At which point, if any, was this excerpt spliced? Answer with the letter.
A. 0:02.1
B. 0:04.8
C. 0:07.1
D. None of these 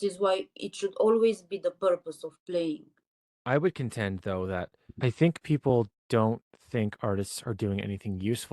B